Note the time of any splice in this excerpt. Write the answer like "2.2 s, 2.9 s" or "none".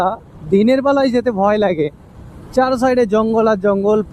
none